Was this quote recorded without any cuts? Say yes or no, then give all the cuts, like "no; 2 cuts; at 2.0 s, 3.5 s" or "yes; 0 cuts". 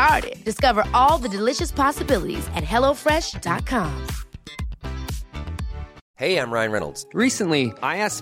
no; 1 cut; at 6.0 s